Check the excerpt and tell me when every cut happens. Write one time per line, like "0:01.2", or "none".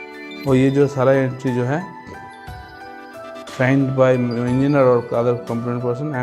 0:01.9
0:03.6

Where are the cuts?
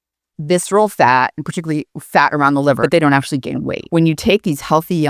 0:02.8
0:03.8

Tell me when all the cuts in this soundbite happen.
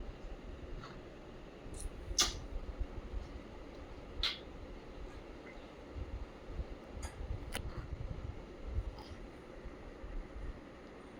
none

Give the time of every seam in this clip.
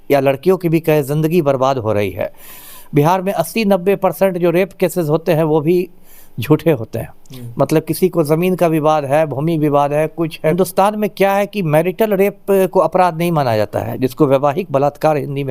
0:02.6
0:10.5

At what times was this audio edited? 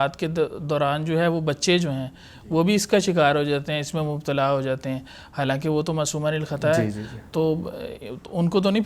none

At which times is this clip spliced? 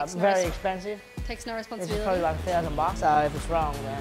none

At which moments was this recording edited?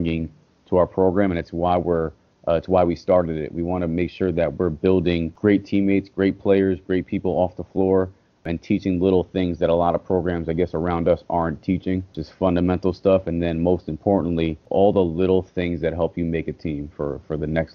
0:05.3
0:08.4
0:12.2
0:14.6

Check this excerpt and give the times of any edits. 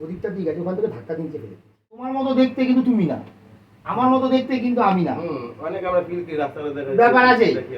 0:02.1

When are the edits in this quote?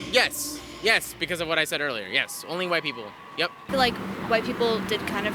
0:03.7

